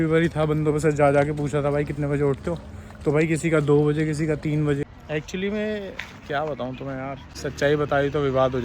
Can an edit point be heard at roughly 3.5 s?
no; 2 cuts; at 4.8 s, 7.3 s

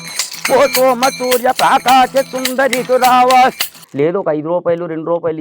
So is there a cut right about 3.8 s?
yes; 1 cut; at 3.8 s

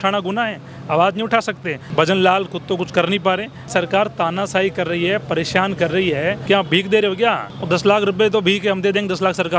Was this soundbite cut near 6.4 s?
yes; 4 cuts; at 1.8 s, 3.7 s, 6.4 s, 7.5 s

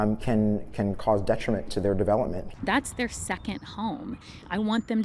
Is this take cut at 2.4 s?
yes; 1 cut; at 2.4 s

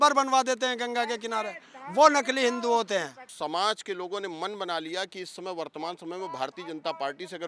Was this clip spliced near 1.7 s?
no; 1 cut; at 3.3 s

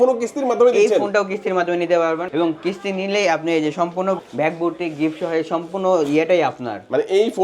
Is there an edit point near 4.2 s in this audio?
yes; 2 cuts; at 2.3 s, 4.2 s

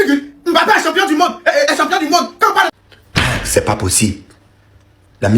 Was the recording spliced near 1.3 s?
no; 1 cut; at 2.7 s

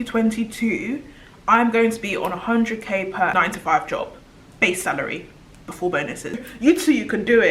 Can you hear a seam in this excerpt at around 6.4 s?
yes; 2 cuts; at 3.3 s, 6.4 s

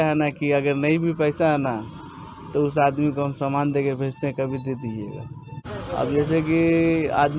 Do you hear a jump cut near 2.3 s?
no; 1 cut; at 5.8 s

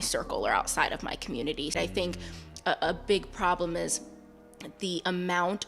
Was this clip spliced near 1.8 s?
yes; 1 cut; at 1.8 s

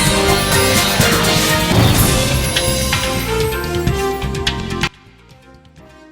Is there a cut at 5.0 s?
yes; 1 cut; at 5.0 s

